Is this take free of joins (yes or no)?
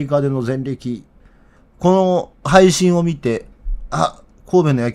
no